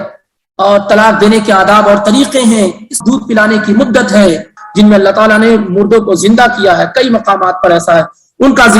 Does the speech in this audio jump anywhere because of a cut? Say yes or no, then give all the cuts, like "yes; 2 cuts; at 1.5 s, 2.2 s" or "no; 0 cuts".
yes; 2 cuts; at 2.9 s, 4.6 s